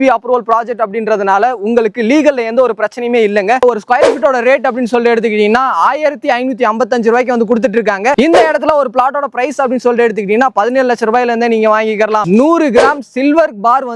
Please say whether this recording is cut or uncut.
cut